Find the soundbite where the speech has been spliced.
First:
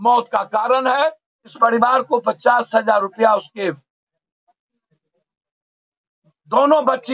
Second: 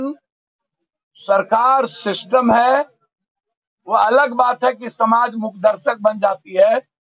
first; 1 cut; at 1.5 s

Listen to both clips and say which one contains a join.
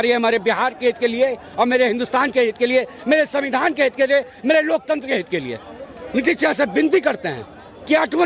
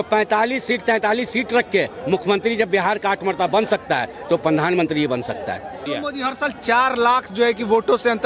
second; 1 cut; at 5.7 s

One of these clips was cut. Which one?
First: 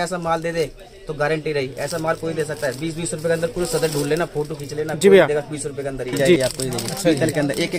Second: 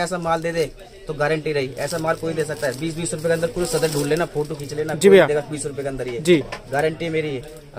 first; 1 cut; at 6.4 s

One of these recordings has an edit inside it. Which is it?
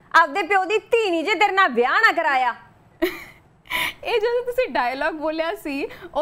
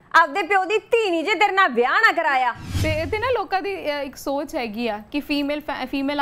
second; 1 cut; at 2.7 s

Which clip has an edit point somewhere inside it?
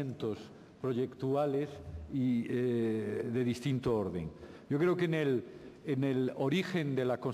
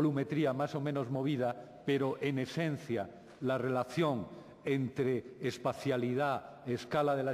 first; 1 cut; at 3.1 s

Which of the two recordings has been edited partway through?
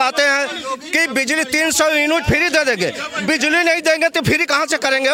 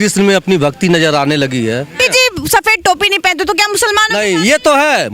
second; 1 cut; at 1.9 s

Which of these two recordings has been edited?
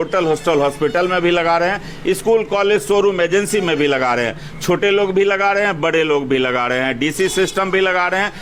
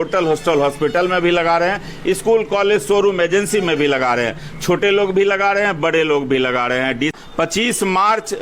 second; 1 cut; at 7.1 s

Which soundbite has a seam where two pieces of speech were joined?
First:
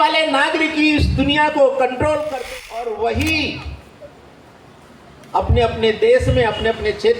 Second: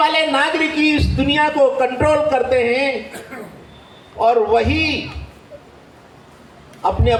first; 1 cut; at 2.3 s

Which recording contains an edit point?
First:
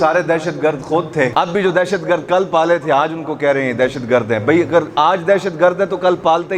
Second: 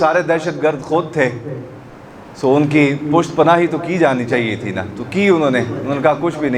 first; 1 cut; at 1.3 s

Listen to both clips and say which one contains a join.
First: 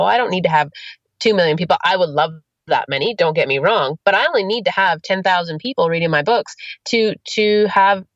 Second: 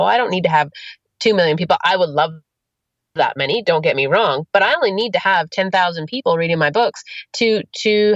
first; 1 cut; at 2.5 s

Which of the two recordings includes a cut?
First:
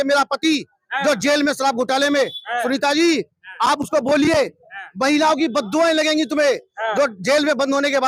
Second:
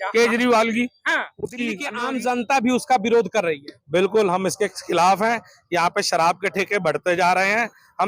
second; 1 cut; at 1.9 s

